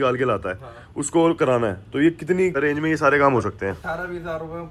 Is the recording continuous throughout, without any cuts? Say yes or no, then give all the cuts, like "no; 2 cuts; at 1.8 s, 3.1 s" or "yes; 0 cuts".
no; 1 cut; at 2.6 s